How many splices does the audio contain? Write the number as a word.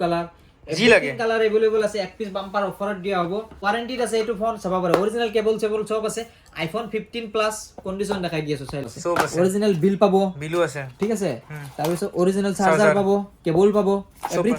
two